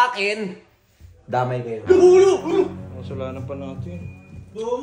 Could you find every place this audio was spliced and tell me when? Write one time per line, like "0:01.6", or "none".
none